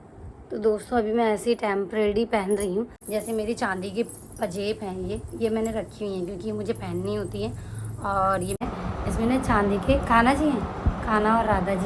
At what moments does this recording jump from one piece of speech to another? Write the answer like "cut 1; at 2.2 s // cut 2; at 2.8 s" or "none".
cut 1; at 3.0 s // cut 2; at 8.6 s